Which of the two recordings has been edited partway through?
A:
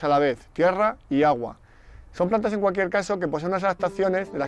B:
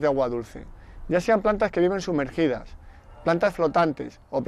A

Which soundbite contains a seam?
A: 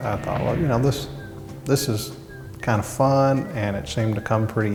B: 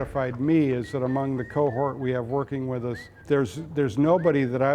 B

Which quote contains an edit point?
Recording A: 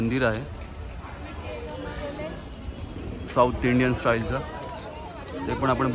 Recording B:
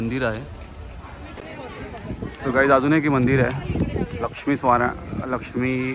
B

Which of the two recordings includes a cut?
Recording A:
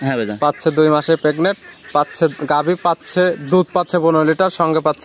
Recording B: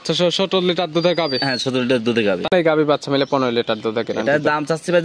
B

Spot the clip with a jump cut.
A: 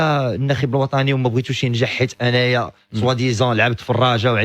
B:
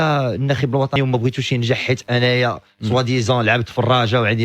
B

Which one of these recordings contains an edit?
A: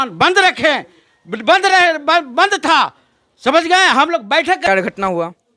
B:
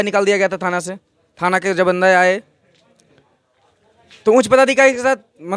A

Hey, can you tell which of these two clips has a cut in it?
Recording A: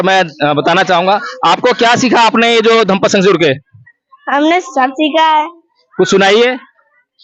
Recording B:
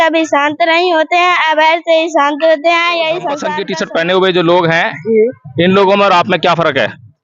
B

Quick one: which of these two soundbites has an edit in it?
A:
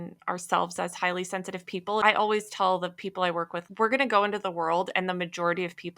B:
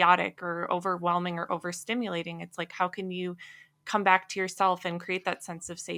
A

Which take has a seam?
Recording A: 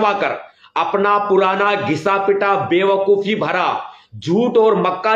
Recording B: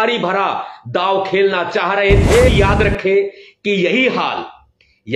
B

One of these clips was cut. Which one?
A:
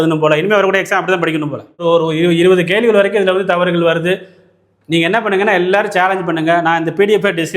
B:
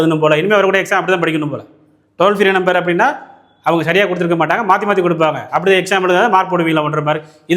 A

